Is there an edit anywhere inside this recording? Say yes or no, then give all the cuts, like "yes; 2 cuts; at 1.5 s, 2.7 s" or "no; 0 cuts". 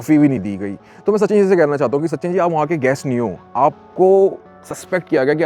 no; 0 cuts